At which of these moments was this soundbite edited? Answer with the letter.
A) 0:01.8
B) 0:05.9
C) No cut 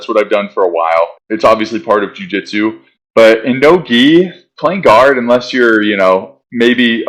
C